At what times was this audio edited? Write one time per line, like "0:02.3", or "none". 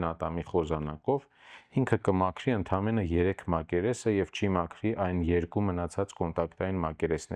none